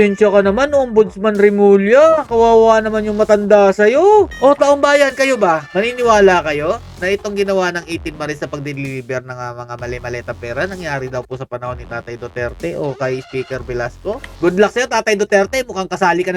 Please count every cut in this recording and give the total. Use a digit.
2